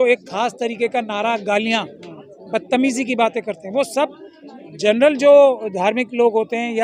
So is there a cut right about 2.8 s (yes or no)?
no